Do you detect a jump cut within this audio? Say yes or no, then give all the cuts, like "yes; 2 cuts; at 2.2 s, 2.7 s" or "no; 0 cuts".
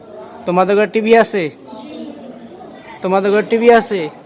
yes; 1 cut; at 2.8 s